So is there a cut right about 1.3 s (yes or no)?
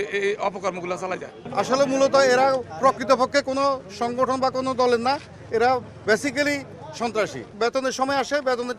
yes